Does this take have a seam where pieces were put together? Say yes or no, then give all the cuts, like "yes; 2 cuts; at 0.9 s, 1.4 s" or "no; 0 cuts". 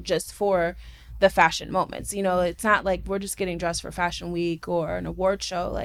no; 0 cuts